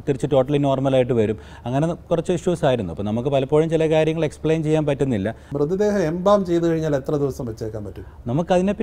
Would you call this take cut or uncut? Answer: cut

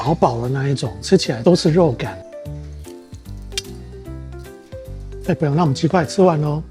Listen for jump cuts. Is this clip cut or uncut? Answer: uncut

